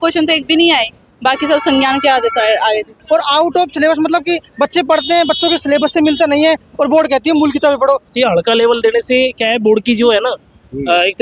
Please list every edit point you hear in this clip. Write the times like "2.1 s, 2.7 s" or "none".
3.0 s, 8.1 s